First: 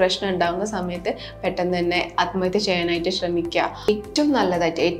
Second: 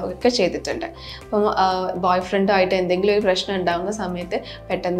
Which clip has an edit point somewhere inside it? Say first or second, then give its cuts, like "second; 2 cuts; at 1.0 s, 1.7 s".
first; 1 cut; at 3.9 s